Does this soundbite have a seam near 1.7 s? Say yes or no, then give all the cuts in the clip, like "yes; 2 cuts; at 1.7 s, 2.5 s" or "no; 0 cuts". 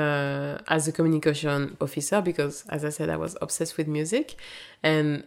yes; 1 cut; at 1.7 s